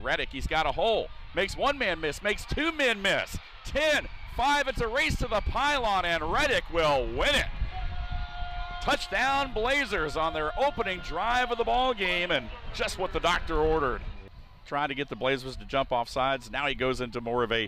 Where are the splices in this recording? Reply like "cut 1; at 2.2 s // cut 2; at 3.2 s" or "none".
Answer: none

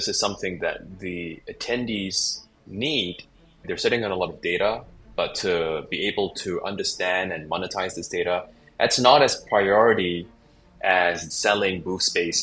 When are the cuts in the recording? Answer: cut 1; at 3.6 s // cut 2; at 11.2 s

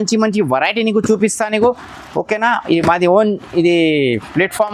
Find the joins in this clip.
none

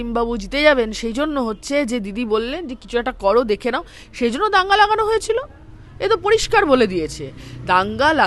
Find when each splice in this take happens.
none

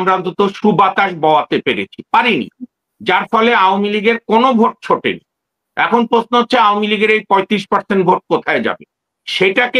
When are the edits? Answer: none

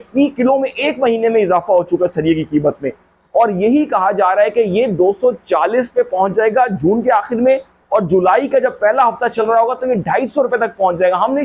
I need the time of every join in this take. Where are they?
none

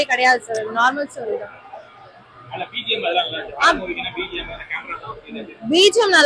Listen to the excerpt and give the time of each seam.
none

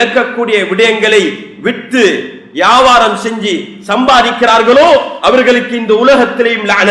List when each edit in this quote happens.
none

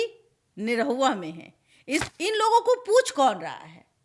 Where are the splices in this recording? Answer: cut 1; at 2.1 s

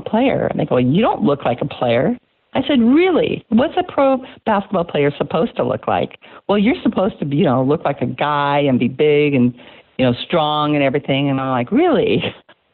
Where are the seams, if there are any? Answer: none

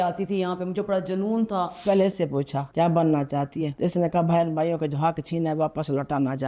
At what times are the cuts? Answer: cut 1; at 1.8 s // cut 2; at 2.6 s // cut 3; at 3.6 s

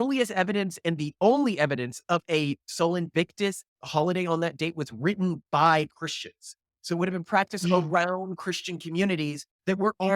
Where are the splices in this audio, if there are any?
none

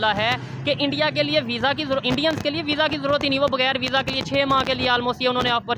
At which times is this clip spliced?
none

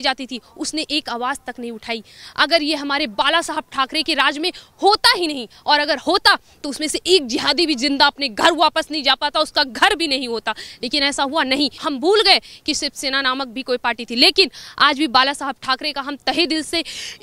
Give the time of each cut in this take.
cut 1; at 11.8 s

